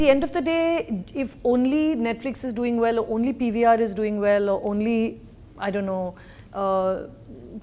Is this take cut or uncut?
uncut